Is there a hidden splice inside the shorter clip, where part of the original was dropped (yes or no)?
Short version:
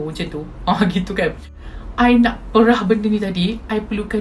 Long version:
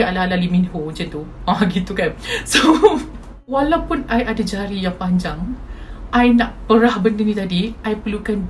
yes